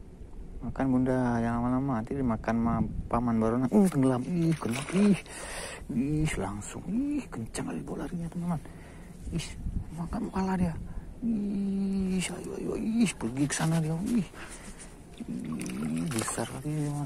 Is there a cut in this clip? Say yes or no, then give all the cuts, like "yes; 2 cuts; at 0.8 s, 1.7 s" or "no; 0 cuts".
no; 0 cuts